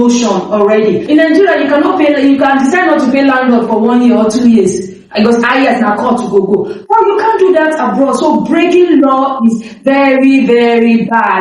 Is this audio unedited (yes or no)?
no